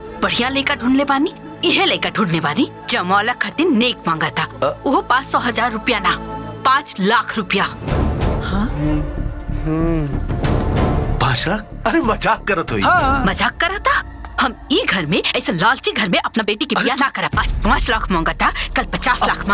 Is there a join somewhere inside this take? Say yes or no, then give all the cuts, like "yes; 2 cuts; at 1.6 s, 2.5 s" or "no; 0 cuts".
no; 0 cuts